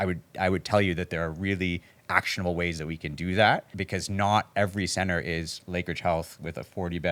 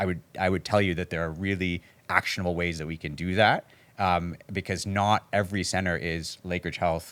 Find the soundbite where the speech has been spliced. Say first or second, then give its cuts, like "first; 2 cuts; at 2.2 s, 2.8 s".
first; 1 cut; at 3.8 s